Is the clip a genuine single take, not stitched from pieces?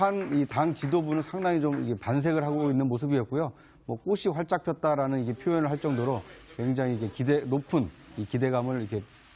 no; 1 cut; at 5.8 s

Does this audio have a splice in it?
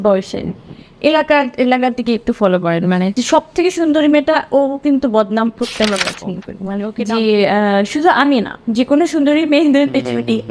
yes; 1 cut; at 6.5 s

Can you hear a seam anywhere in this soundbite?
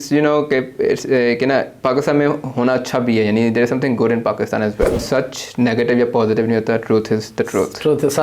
yes; 1 cut; at 5.0 s

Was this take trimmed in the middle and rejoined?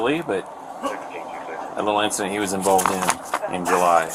no; 0 cuts

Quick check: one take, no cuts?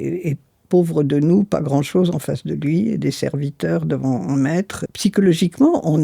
no; 1 cut; at 4.8 s

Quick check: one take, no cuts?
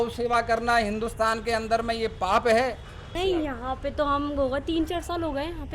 no; 1 cut; at 3.2 s

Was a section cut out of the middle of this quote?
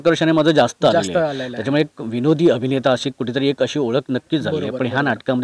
no; 0 cuts

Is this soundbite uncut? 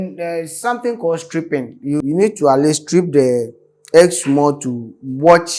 no; 1 cut; at 2.0 s

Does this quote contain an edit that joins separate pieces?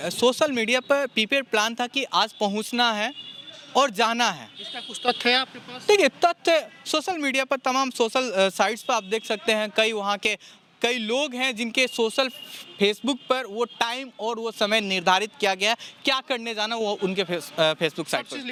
no; 0 cuts

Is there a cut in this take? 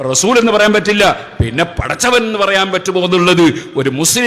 no; 0 cuts

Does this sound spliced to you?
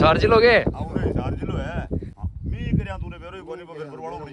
yes; 1 cut; at 2.1 s

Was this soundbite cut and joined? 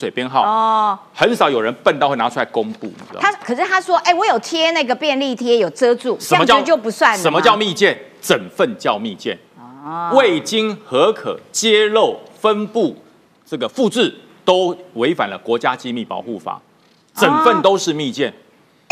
no; 0 cuts

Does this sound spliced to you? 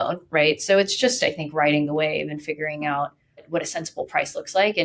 no; 0 cuts

